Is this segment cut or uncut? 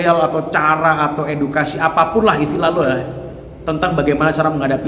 uncut